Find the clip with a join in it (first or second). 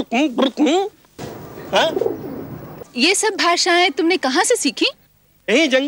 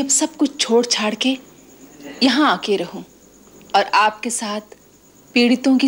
first